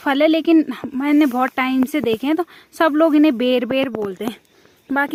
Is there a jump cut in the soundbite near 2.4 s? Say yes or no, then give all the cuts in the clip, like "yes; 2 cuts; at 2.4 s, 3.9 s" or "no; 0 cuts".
no; 0 cuts